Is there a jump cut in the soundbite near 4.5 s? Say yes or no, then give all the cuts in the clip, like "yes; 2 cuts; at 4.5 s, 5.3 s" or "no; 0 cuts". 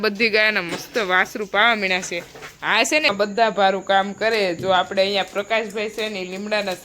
no; 1 cut; at 3.1 s